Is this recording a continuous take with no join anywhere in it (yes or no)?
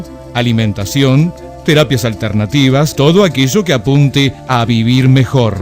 no